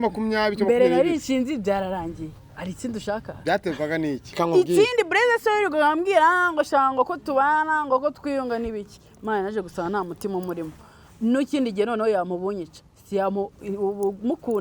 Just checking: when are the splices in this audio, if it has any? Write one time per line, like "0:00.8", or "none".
0:04.3